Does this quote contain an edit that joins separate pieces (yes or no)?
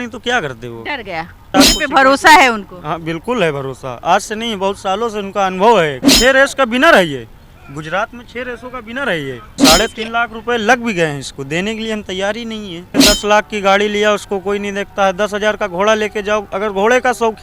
yes